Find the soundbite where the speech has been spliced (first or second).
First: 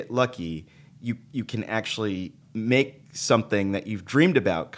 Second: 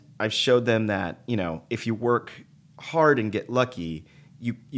first